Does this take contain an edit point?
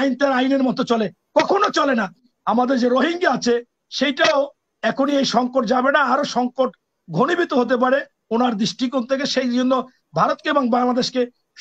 yes; 1 cut; at 2.3 s

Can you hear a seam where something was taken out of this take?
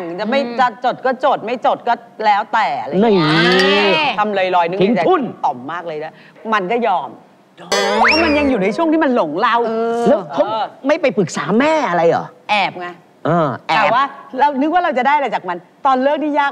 no; 0 cuts

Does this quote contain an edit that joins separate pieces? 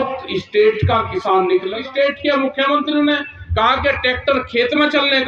yes; 1 cut; at 1.8 s

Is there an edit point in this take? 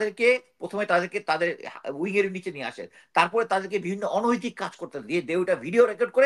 no; 0 cuts

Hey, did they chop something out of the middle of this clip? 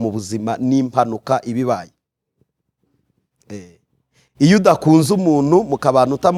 no; 0 cuts

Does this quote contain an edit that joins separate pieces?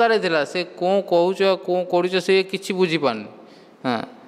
no; 0 cuts

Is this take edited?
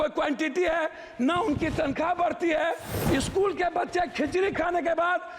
yes; 1 cut; at 2.9 s

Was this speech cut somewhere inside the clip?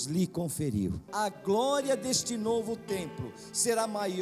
yes; 1 cut; at 1.0 s

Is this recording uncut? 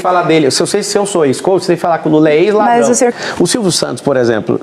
no; 1 cut; at 3.2 s

